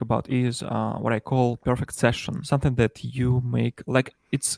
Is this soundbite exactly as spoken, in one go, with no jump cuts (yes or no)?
no